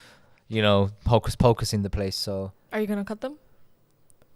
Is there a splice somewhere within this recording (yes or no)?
yes